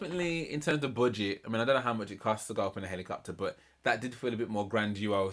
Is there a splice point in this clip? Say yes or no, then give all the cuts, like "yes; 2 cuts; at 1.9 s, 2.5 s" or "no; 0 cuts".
no; 0 cuts